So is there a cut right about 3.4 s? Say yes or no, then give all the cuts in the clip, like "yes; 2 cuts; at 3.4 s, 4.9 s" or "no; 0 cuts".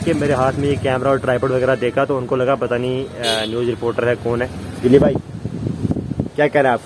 no; 1 cut; at 4.8 s